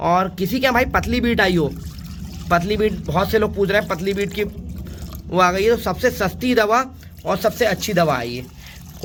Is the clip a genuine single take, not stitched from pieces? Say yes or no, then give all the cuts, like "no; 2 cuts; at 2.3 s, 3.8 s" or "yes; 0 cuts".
yes; 0 cuts